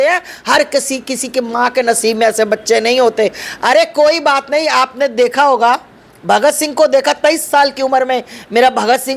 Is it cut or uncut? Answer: uncut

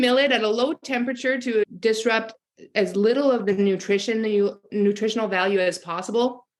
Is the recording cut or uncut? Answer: cut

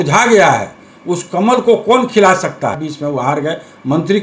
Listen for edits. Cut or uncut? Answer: cut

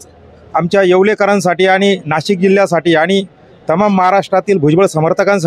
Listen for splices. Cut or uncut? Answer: uncut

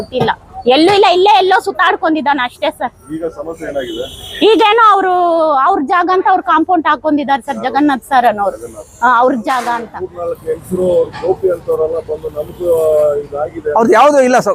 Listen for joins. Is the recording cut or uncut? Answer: cut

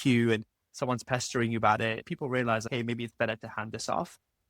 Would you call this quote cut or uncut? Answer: cut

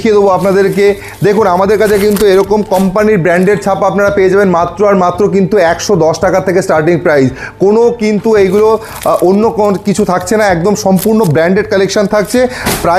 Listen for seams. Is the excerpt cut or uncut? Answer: uncut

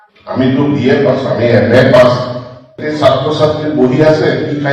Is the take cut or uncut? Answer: cut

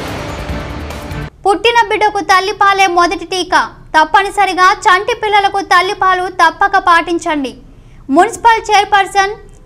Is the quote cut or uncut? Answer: cut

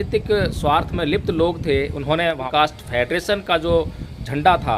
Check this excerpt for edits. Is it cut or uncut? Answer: cut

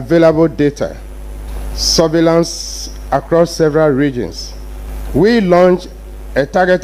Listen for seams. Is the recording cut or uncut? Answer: uncut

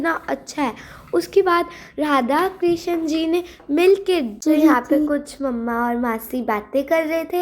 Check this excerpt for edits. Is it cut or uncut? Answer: cut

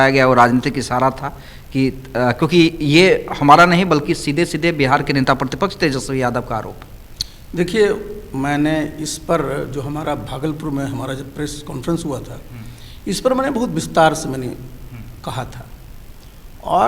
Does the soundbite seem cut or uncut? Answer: uncut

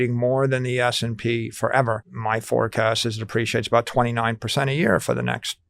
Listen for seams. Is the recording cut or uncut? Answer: cut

